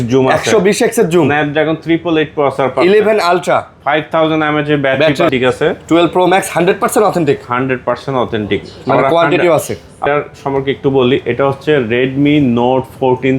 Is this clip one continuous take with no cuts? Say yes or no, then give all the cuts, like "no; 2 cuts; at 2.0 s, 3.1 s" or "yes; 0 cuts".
no; 2 cuts; at 5.3 s, 10.0 s